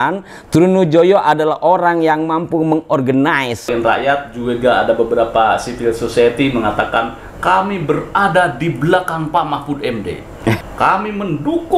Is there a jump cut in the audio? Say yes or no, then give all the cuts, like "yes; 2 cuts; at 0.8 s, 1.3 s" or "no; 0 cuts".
yes; 2 cuts; at 3.7 s, 10.6 s